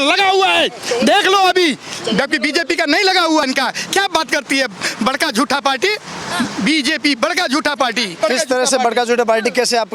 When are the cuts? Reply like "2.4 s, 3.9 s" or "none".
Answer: 3.4 s, 8.1 s